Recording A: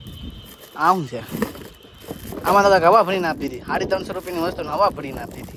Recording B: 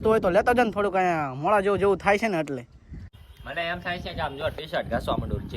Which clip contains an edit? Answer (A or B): B